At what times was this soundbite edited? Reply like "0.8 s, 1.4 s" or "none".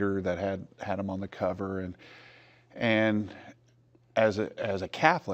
4.3 s